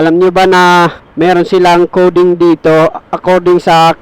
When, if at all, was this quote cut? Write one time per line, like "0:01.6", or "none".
0:01.0